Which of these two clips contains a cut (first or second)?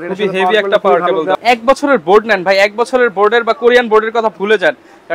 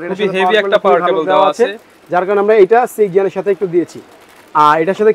first